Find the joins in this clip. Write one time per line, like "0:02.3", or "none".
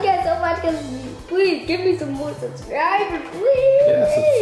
none